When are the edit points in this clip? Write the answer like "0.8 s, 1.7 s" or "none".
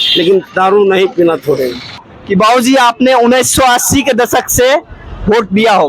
2.1 s